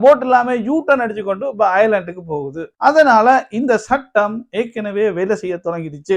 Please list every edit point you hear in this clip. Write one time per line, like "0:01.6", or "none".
none